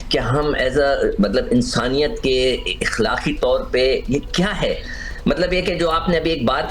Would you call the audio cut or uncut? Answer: uncut